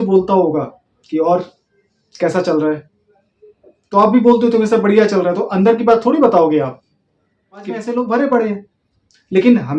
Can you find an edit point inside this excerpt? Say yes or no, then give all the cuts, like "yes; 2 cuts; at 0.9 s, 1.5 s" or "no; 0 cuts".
yes; 1 cut; at 7.7 s